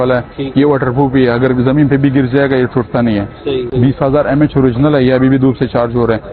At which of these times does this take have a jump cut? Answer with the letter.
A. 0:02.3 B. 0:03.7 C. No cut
B